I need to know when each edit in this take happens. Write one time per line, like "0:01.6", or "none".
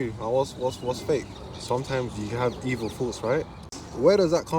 0:01.3
0:03.7